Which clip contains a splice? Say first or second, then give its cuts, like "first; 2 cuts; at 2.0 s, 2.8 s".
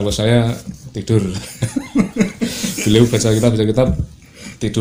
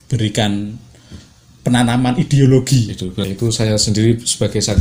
second; 1 cut; at 3.1 s